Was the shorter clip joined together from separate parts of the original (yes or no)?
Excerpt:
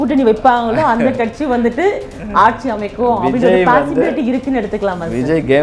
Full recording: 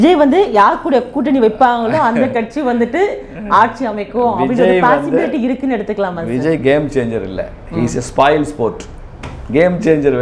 no